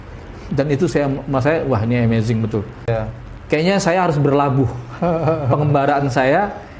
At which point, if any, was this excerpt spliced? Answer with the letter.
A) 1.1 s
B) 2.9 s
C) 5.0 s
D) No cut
B